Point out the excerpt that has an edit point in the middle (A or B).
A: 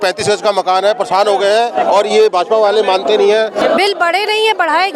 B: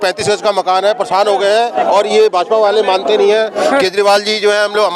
A